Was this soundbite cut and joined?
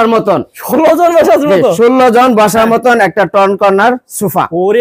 no; 0 cuts

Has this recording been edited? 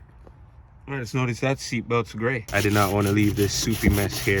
yes; 1 cut; at 2.4 s

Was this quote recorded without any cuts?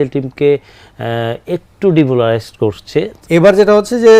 no; 1 cut; at 3.1 s

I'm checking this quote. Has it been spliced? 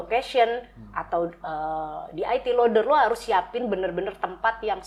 no; 0 cuts

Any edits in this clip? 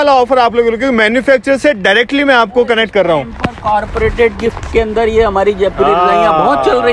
no; 0 cuts

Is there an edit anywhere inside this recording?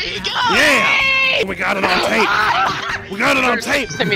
yes; 1 cut; at 1.4 s

